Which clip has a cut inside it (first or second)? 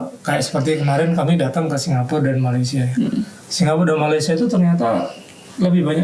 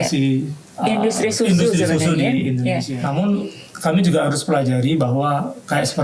second